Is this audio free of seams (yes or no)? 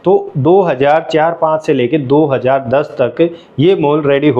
yes